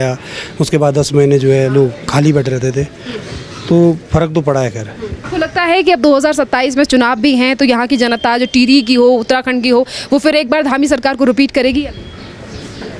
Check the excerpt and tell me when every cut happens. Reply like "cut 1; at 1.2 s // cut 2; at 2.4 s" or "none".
cut 1; at 5.2 s